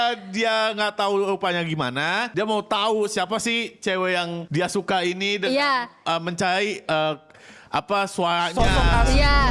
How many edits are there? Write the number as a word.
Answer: two